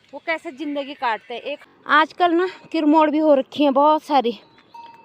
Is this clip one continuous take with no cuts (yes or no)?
no